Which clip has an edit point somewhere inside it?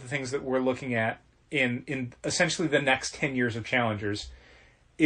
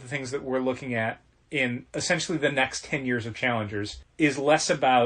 second; 2 cuts; at 1.9 s, 4.0 s

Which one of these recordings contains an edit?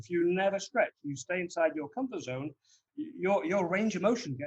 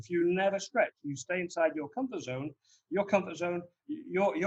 first; 1 cut; at 2.8 s

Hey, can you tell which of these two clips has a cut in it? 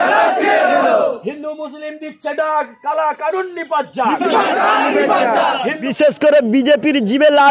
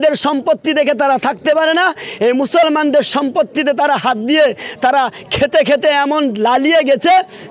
first; 1 cut; at 5.9 s

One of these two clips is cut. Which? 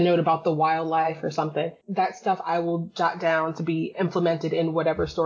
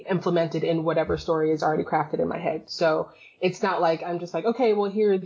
first; 1 cut; at 1.8 s

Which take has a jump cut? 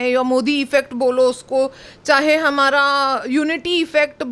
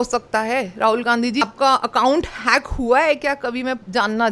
second; 1 cut; at 1.4 s

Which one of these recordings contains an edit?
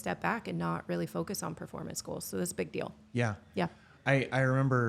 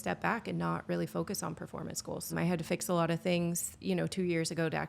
second; 2 cuts; at 2.3 s, 3.7 s

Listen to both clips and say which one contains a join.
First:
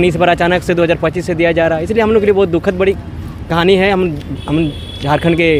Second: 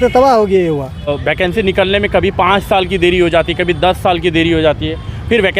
second; 1 cut; at 1.1 s

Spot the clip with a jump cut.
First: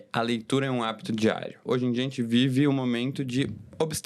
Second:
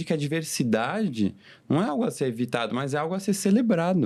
first; 1 cut; at 1.6 s

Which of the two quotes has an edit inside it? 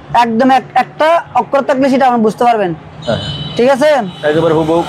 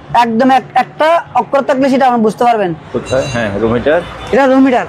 second; 1 cut; at 2.9 s

